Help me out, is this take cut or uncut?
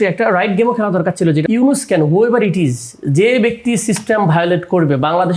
cut